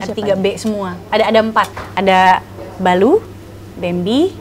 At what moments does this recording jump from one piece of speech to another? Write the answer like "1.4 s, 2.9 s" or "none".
0.9 s, 1.8 s